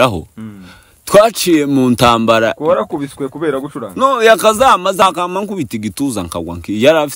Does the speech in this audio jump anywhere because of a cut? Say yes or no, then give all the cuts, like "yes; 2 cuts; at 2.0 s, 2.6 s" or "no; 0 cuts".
yes; 1 cut; at 5.0 s